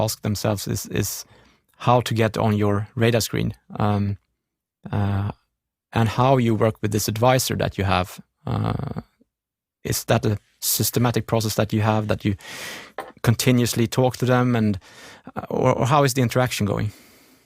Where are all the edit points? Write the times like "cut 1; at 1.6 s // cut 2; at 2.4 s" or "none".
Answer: none